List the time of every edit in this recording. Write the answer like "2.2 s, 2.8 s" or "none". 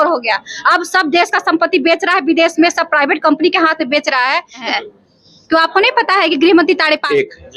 4.6 s